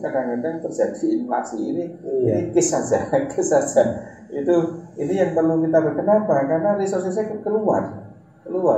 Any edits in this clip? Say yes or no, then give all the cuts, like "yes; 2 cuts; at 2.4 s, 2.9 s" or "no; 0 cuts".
no; 0 cuts